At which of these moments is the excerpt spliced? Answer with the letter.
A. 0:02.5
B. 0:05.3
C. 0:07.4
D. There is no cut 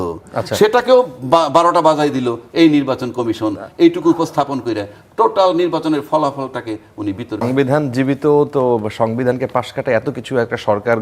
C